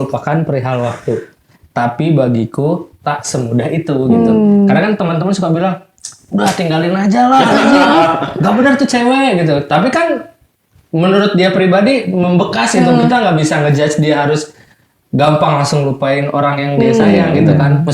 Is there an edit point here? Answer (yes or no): no